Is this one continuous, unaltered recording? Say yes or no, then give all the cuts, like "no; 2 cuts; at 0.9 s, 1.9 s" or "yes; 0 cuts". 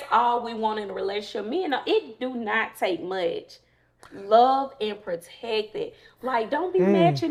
yes; 0 cuts